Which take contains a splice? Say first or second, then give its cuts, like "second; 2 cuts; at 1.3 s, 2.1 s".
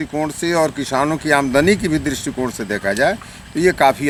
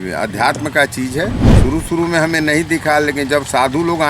second; 1 cut; at 1.5 s